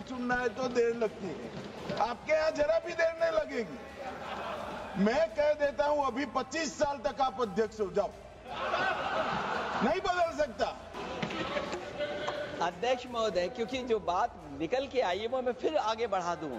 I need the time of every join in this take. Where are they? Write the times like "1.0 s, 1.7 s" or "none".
11.0 s